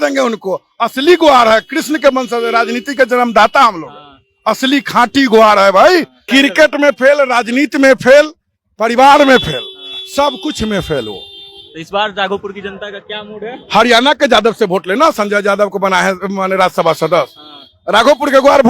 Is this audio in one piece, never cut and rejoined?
no; 1 cut; at 6.2 s

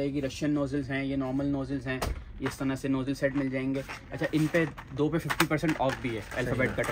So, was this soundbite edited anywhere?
no; 0 cuts

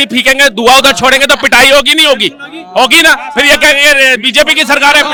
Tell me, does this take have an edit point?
no; 0 cuts

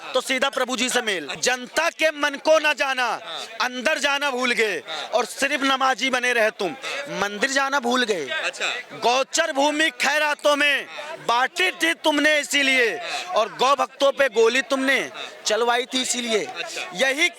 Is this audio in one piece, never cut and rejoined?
no; 1 cut; at 1.4 s

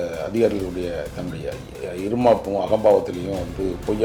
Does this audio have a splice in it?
no; 0 cuts

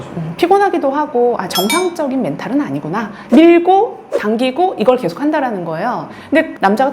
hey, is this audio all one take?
no; 1 cut; at 3.2 s

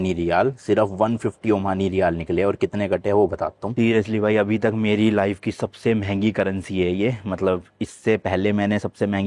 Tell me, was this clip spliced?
yes; 1 cut; at 3.7 s

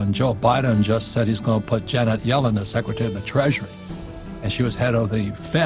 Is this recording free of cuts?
yes; 0 cuts

